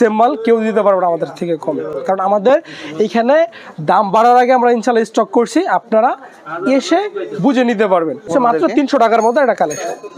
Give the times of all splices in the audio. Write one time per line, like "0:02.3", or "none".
none